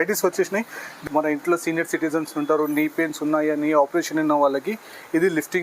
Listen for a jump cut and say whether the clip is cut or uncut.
cut